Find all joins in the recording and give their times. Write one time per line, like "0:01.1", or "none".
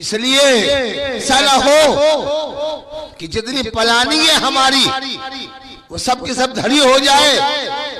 0:01.2